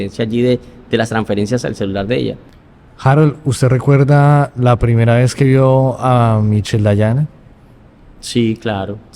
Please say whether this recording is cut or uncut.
cut